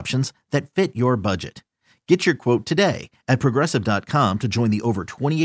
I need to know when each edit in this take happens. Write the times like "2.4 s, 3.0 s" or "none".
none